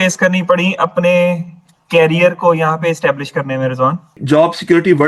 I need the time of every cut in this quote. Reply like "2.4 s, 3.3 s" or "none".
4.1 s